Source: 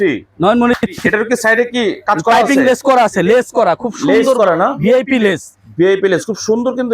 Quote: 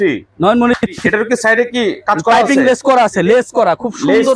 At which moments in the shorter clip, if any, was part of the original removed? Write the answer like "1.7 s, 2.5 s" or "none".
none